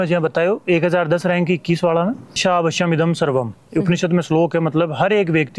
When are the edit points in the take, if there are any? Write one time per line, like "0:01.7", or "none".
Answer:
0:02.4